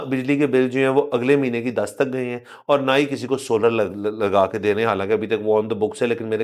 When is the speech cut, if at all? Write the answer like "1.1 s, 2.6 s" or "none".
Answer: none